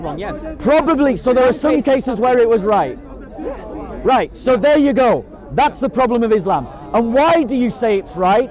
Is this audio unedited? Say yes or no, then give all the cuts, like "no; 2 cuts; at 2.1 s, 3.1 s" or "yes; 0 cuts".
yes; 0 cuts